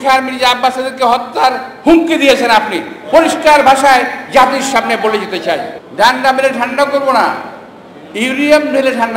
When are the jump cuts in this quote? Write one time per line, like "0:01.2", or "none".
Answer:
0:05.8